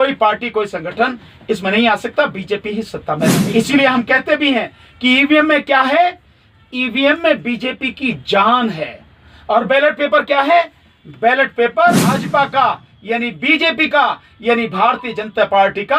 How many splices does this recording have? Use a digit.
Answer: 2